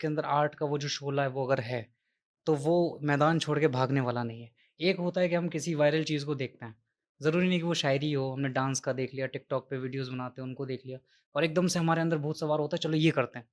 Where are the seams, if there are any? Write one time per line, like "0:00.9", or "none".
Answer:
none